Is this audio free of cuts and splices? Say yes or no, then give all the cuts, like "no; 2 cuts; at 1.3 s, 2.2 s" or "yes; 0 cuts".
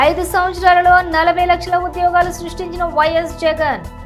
yes; 0 cuts